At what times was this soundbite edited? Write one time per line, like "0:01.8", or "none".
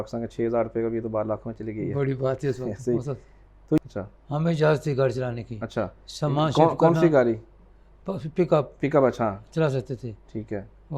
0:03.8